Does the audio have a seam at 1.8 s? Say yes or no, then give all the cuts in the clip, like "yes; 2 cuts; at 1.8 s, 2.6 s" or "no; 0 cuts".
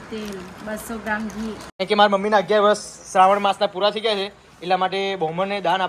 yes; 1 cut; at 1.8 s